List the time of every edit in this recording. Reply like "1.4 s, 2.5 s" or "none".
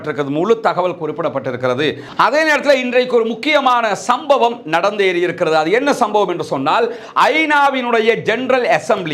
2.1 s